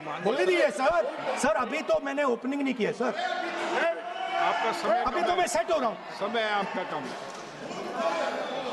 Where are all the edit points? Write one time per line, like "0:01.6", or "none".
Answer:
0:01.3